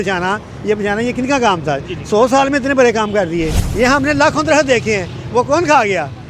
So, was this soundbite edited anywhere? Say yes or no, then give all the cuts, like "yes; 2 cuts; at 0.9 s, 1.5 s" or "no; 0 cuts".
yes; 1 cut; at 3.6 s